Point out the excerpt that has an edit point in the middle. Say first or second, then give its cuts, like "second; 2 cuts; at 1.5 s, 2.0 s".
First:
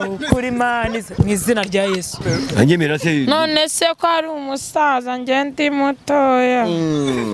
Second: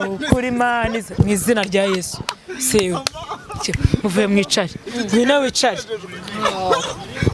first; 1 cut; at 2.2 s